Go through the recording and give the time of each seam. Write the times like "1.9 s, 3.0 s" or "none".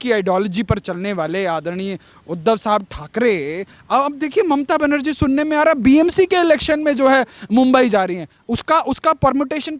none